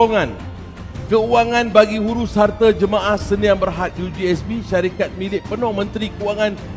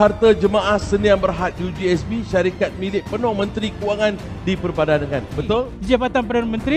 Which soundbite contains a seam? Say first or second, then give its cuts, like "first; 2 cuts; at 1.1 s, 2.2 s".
second; 1 cut; at 5.4 s